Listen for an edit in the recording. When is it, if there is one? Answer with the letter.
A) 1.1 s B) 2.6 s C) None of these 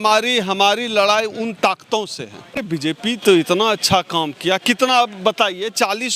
B